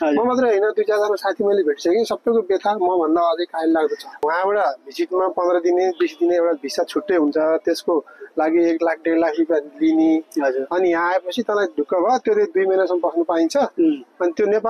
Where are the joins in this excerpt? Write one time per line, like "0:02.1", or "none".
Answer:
0:04.2